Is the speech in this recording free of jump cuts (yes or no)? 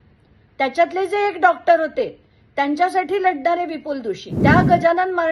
no